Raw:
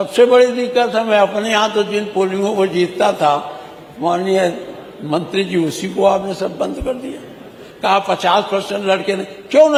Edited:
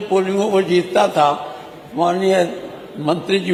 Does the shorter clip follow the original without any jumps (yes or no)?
yes